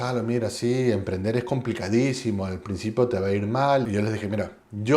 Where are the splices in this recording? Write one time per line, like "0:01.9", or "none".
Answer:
0:03.9

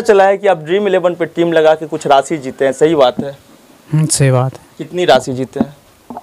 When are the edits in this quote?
none

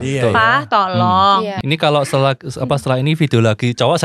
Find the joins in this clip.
0:01.6

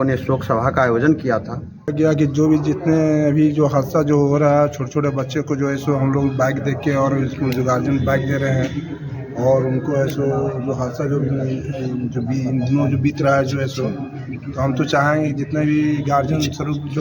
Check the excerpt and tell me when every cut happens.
0:01.9

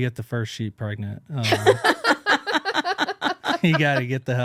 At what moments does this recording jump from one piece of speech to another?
none

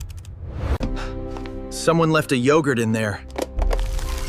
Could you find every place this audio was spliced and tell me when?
0:03.3

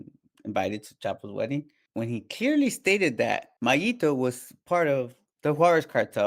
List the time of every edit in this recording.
0:01.8
0:03.5
0:05.2

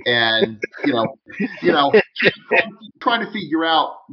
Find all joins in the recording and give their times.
0:01.2
0:03.0

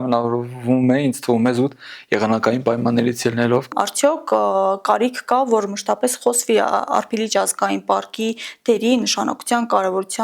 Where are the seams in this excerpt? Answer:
0:03.7

